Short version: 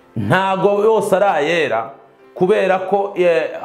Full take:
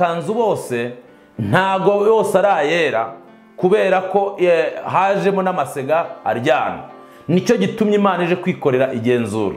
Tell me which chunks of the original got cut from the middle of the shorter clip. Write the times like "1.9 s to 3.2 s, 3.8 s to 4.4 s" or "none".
none